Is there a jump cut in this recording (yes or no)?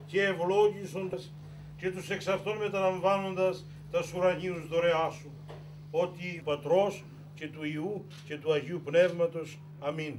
yes